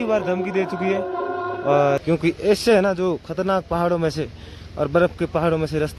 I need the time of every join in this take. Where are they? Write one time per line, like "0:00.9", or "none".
0:02.0